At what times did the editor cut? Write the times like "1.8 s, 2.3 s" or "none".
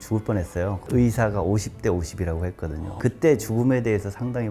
2.9 s

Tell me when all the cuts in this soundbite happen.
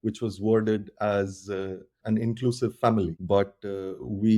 1.9 s, 3.2 s

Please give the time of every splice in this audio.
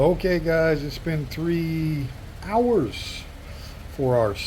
none

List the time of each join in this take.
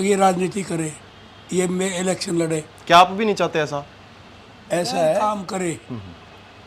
5.2 s

